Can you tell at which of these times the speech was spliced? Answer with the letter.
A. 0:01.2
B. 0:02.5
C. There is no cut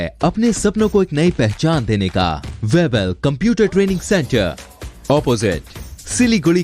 B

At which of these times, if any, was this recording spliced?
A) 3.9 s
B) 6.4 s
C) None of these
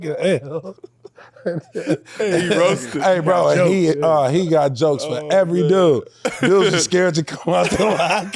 C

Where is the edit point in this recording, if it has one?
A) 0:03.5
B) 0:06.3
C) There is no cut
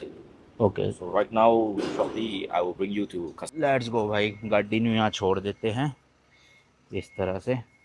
A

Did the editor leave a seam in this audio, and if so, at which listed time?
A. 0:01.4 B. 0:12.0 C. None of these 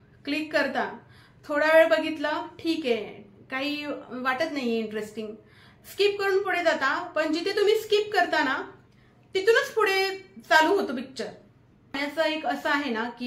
B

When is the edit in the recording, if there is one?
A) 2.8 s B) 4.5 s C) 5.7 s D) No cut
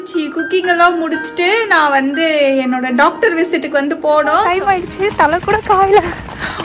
B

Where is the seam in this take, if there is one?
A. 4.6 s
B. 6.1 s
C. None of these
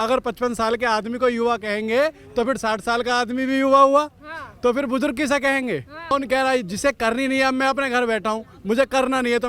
B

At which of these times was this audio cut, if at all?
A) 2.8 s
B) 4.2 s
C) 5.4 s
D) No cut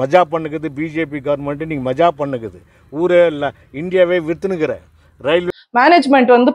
C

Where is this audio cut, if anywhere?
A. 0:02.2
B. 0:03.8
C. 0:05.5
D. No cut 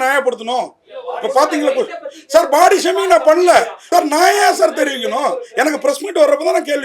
B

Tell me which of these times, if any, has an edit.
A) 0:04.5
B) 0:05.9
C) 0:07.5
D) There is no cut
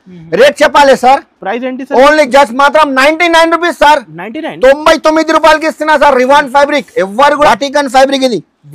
C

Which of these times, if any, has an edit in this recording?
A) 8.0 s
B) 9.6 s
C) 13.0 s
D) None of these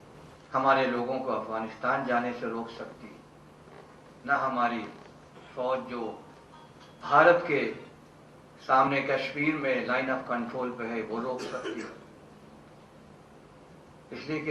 D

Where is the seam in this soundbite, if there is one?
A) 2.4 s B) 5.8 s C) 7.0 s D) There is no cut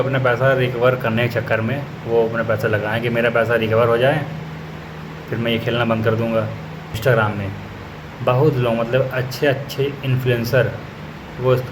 C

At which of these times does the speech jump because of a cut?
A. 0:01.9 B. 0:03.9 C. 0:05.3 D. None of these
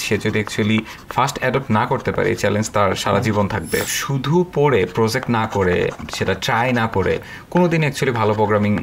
B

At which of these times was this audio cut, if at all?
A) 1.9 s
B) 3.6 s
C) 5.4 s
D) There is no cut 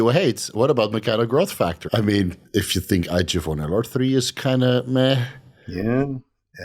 A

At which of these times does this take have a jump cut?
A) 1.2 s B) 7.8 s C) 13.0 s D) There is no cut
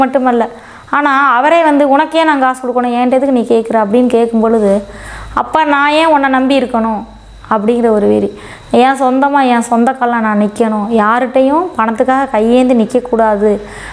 D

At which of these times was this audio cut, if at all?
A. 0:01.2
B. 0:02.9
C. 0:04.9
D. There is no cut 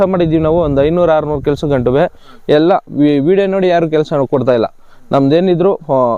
D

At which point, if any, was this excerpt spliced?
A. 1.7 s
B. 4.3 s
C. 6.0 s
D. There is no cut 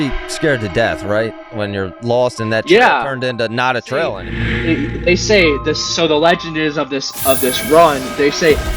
B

